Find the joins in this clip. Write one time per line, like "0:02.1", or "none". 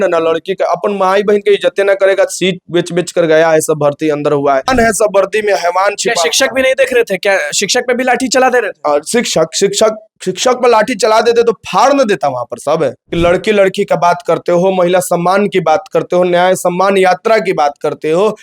0:04.7
0:13.0